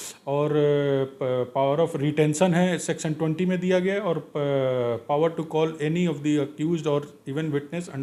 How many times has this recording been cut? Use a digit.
0